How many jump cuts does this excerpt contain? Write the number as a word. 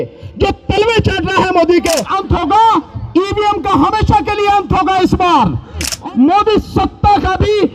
two